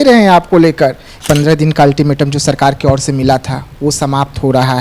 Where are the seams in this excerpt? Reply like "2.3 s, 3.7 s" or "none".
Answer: 1.1 s